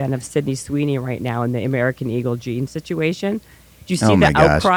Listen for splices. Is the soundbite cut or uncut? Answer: uncut